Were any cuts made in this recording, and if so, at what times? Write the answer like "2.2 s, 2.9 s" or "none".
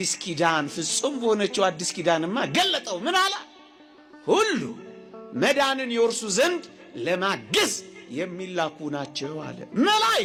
none